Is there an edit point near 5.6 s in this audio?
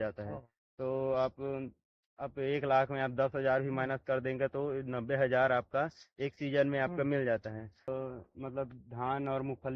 no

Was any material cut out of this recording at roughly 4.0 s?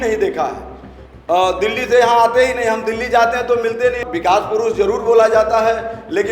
yes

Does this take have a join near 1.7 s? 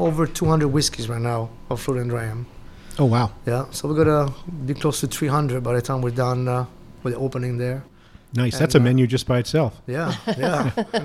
no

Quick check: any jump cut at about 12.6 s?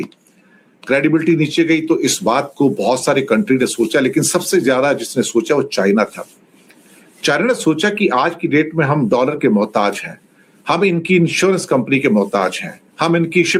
no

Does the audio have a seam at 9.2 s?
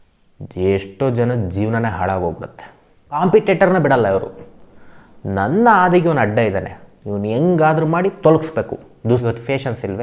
yes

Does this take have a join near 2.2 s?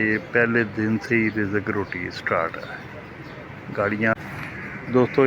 no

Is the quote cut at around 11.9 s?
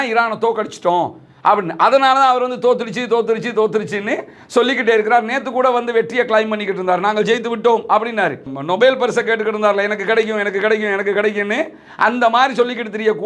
no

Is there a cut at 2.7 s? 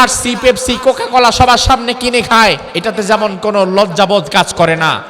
yes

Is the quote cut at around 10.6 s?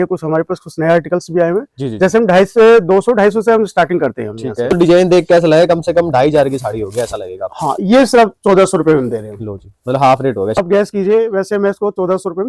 yes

